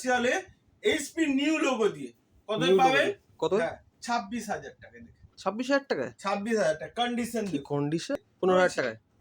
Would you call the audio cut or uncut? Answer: cut